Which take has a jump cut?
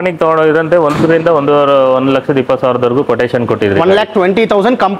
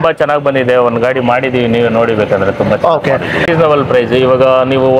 second; 1 cut; at 3.5 s

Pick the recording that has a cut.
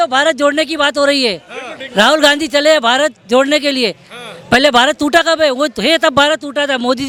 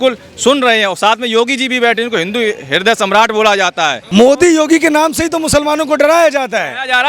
second; 1 cut; at 4.0 s

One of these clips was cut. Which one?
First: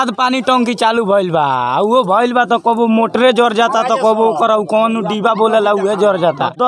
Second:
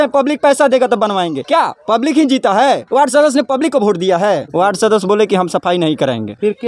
second; 1 cut; at 4.5 s

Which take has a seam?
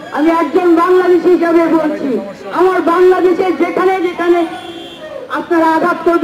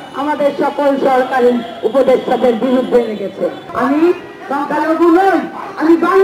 second; 1 cut; at 3.6 s

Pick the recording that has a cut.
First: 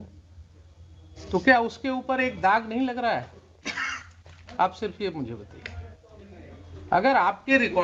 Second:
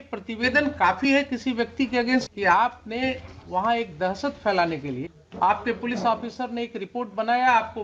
second; 2 cuts; at 2.3 s, 5.2 s

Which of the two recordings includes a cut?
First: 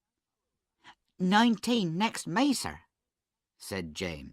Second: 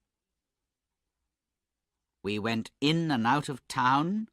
first; 1 cut; at 2.1 s

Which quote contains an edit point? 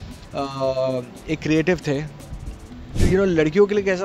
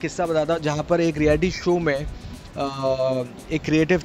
first; 1 cut; at 3.0 s

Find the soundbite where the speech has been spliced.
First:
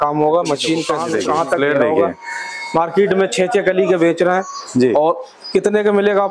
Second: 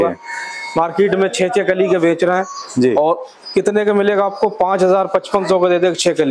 first; 1 cut; at 0.9 s

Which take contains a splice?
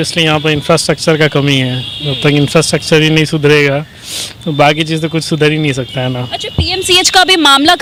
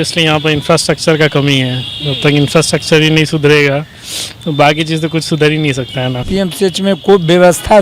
second; 1 cut; at 6.2 s

